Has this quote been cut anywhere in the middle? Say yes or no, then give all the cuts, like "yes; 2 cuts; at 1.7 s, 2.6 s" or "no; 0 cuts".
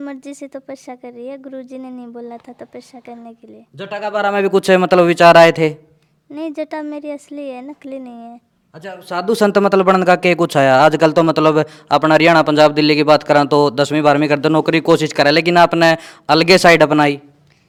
no; 0 cuts